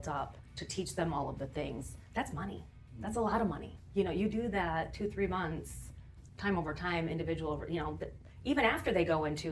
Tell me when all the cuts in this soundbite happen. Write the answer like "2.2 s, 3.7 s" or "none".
none